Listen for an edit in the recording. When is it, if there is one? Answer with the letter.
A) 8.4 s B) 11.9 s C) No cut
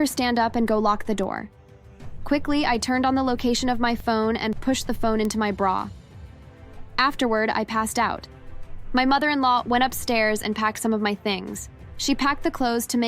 B